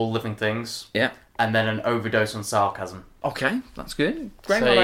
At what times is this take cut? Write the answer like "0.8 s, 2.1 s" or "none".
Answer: none